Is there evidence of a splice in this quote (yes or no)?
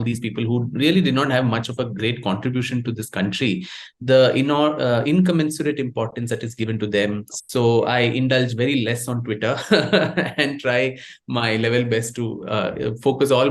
yes